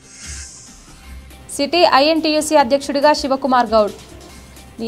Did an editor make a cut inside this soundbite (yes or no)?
yes